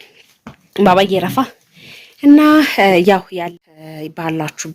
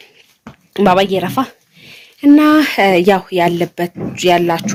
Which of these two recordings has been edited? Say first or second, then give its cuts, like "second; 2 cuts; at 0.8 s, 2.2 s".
first; 1 cut; at 3.4 s